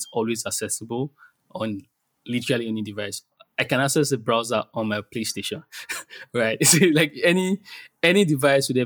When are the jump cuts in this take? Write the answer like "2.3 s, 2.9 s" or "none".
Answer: none